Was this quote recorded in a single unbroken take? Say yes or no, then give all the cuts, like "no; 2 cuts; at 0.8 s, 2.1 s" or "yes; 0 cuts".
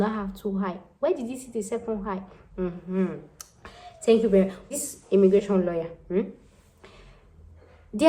no; 1 cut; at 4.6 s